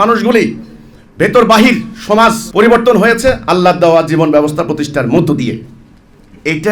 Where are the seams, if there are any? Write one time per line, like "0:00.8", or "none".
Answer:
none